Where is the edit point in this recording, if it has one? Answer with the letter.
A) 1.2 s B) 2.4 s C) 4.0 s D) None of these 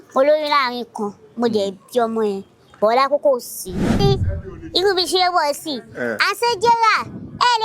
C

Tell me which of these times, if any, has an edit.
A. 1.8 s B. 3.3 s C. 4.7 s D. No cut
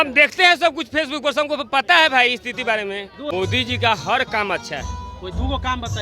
B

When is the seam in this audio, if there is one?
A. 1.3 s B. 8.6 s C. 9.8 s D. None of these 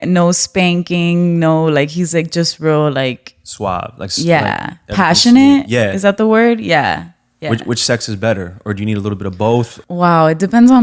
C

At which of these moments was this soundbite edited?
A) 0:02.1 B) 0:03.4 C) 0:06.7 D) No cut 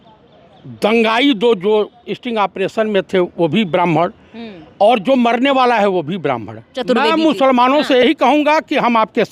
C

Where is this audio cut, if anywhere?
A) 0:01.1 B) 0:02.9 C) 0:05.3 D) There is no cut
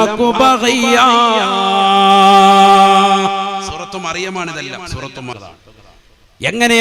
C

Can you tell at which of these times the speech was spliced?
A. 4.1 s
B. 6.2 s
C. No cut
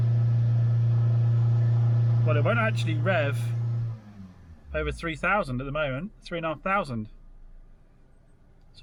C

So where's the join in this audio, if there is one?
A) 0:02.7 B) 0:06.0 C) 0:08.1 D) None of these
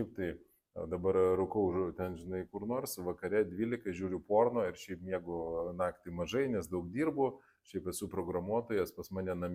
D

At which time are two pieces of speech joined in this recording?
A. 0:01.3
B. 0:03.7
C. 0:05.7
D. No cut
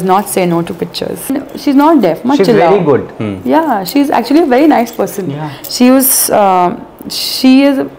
A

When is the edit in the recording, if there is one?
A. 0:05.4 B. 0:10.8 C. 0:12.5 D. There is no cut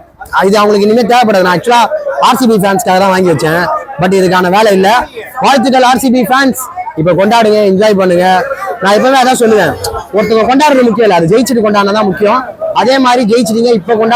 D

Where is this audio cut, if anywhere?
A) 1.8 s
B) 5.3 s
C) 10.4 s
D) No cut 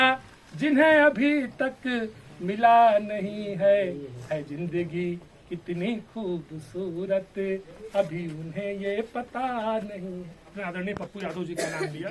C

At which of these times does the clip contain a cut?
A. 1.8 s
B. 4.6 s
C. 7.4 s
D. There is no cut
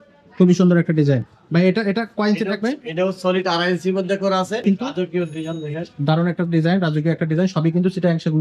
B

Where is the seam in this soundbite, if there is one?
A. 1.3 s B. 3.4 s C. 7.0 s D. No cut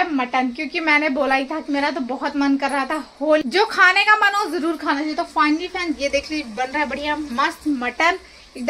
B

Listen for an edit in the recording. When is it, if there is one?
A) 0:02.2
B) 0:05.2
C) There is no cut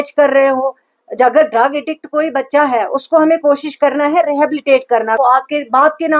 B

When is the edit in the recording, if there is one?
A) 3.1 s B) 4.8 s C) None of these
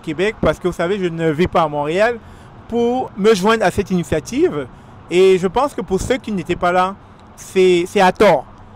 A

